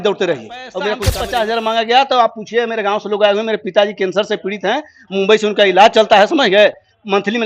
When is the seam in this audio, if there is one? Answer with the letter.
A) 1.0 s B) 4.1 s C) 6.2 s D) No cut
A